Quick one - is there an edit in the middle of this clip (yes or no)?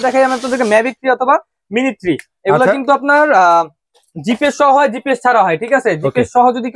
no